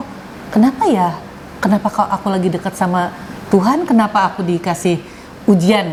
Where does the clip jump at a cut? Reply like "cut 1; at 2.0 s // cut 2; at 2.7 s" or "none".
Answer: none